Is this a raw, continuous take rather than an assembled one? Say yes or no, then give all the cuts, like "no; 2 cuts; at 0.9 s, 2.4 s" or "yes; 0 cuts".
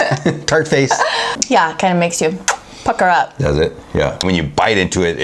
no; 2 cuts; at 1.3 s, 4.2 s